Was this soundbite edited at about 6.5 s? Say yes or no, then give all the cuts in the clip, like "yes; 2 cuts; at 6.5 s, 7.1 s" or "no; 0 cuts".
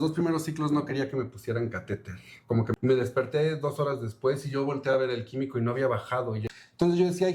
yes; 2 cuts; at 2.7 s, 6.5 s